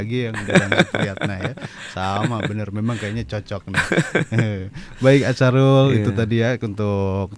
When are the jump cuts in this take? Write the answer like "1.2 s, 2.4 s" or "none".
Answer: none